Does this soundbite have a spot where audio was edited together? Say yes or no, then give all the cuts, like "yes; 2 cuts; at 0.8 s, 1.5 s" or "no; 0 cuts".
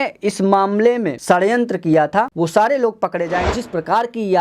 yes; 3 cuts; at 1.1 s, 2.3 s, 3.5 s